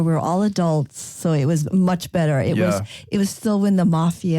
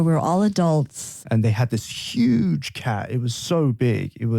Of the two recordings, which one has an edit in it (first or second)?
second